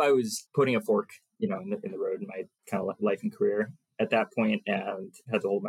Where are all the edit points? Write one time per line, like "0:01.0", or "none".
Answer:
0:03.8

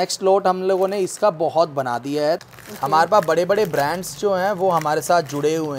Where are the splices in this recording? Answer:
0:02.4

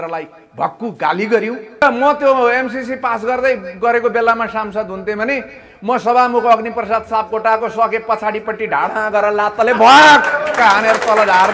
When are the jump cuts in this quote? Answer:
0:01.8

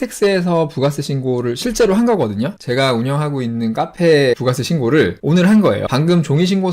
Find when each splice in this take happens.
none

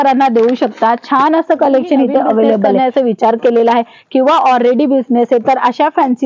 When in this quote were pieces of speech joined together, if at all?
0:02.8

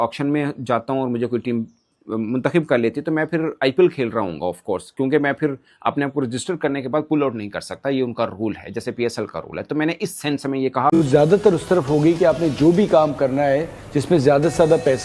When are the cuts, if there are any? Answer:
0:10.9

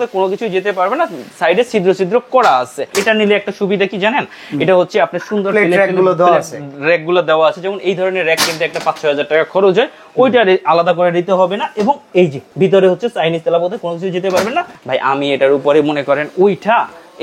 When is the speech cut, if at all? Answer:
0:02.9
0:12.4
0:14.8

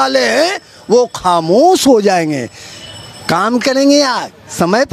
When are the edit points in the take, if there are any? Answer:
none

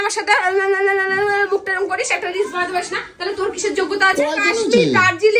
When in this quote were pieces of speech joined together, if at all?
0:01.2
0:04.4

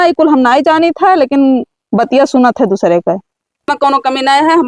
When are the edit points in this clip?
0:03.6

